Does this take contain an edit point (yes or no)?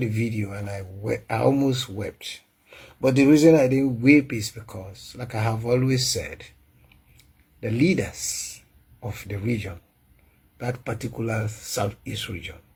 no